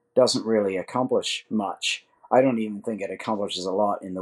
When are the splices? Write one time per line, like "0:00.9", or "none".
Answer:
none